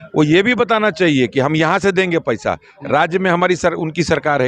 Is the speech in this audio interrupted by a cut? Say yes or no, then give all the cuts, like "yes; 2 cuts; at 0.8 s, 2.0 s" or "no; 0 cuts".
no; 0 cuts